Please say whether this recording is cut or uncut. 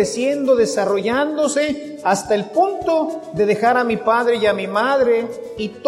uncut